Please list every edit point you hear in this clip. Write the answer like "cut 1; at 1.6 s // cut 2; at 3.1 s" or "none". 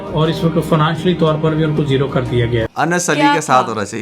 cut 1; at 2.7 s